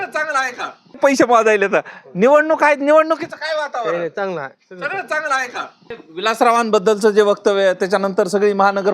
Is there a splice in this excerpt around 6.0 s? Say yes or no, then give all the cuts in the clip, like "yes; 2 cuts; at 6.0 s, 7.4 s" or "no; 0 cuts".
yes; 2 cuts; at 1.0 s, 6.0 s